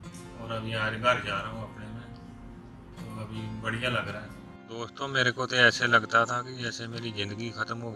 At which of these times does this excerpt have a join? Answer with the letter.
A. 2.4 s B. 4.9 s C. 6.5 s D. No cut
B